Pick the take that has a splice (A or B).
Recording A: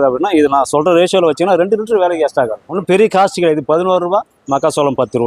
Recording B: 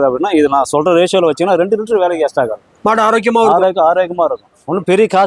A